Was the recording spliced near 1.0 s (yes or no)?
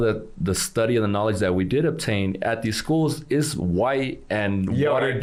no